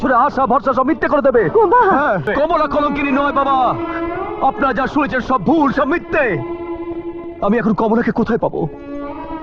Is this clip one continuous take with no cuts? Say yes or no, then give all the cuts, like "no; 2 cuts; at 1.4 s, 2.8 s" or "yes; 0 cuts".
no; 1 cut; at 2.3 s